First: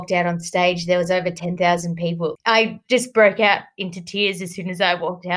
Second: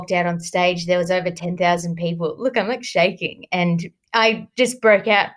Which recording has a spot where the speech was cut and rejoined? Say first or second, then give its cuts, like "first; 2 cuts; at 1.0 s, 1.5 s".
first; 1 cut; at 2.4 s